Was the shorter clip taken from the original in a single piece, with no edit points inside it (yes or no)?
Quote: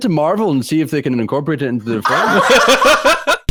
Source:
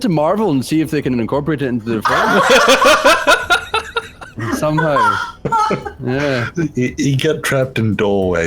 yes